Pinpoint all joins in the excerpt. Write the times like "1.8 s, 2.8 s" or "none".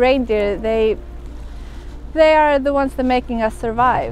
none